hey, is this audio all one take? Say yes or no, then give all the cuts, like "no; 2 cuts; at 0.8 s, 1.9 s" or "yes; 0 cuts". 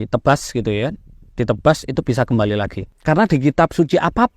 no; 1 cut; at 2.8 s